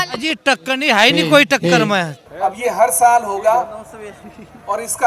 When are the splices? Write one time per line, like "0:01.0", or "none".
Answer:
0:02.2